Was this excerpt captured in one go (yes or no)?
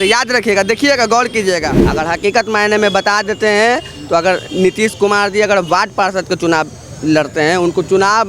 no